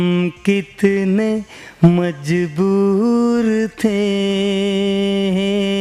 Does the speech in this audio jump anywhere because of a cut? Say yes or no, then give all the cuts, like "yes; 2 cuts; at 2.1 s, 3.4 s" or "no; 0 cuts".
no; 0 cuts